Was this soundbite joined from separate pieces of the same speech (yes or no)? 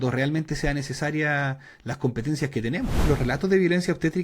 yes